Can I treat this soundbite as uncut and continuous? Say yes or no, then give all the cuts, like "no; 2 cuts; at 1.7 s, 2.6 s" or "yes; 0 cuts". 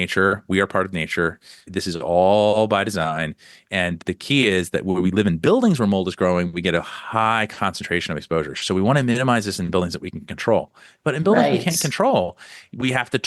no; 2 cuts; at 1.7 s, 4.0 s